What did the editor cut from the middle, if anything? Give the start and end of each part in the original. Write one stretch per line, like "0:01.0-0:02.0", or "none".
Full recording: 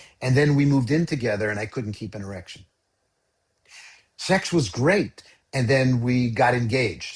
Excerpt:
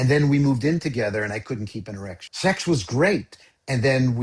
0:02.5-0:04.1